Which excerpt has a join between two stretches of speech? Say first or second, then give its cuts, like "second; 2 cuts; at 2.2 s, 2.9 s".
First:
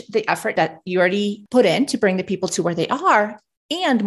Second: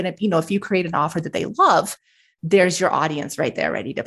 first; 1 cut; at 1.0 s